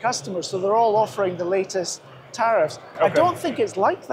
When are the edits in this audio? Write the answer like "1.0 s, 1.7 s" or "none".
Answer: none